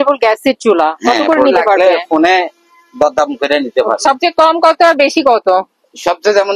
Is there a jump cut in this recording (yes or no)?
yes